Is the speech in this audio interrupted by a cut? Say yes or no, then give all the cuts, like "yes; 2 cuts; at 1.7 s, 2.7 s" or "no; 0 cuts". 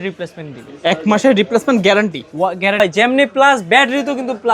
yes; 1 cut; at 2.8 s